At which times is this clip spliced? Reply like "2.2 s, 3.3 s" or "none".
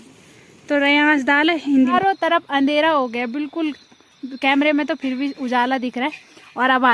1.9 s